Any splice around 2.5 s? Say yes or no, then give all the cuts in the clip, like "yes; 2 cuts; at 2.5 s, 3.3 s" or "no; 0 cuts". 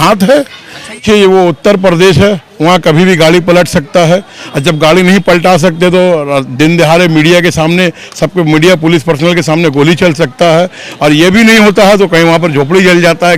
no; 1 cut; at 1.0 s